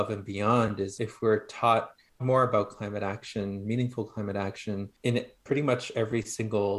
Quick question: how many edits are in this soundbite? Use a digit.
3